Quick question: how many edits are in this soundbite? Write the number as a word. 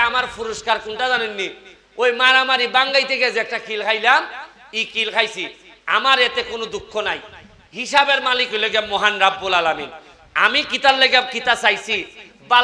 zero